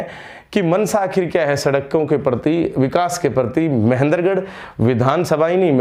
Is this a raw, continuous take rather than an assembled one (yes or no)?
yes